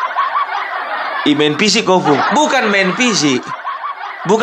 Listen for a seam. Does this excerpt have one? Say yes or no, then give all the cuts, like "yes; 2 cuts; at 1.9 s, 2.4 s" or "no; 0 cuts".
no; 0 cuts